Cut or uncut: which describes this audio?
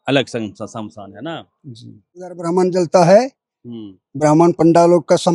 cut